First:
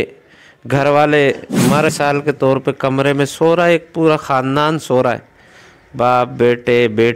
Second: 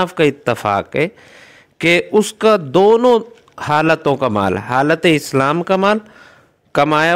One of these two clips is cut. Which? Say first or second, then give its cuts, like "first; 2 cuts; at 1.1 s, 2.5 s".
first; 1 cut; at 1.9 s